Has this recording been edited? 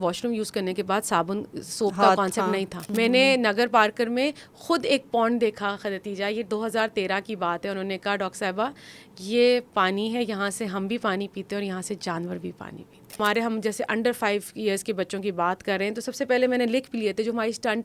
yes; 2 cuts; at 2.8 s, 13.2 s

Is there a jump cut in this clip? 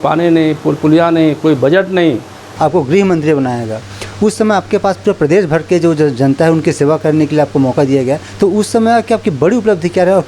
yes; 1 cut; at 2.4 s

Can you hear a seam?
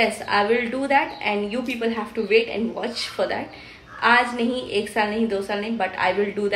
no; 0 cuts

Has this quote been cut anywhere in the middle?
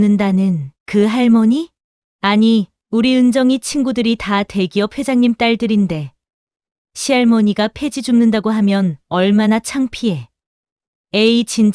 no; 0 cuts

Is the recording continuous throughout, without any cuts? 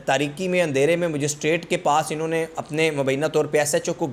yes; 0 cuts

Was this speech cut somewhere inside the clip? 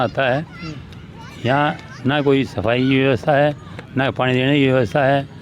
no; 0 cuts

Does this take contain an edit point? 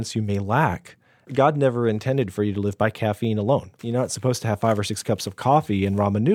yes; 2 cuts; at 1.3 s, 3.7 s

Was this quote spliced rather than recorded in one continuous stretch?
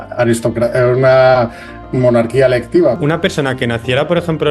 yes; 1 cut; at 3.0 s

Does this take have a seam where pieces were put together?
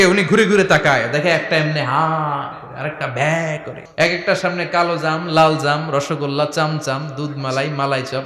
yes; 1 cut; at 3.8 s

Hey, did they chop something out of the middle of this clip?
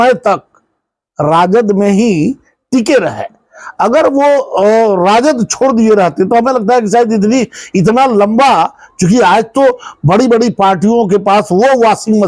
no; 0 cuts

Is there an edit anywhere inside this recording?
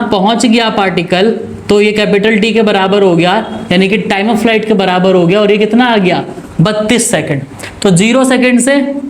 no; 0 cuts

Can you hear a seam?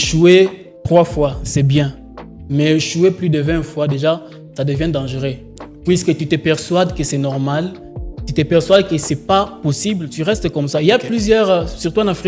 no; 0 cuts

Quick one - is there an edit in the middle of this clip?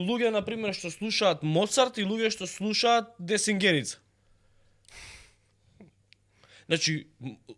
no; 0 cuts

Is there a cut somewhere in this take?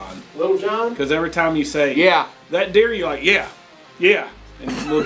no; 0 cuts

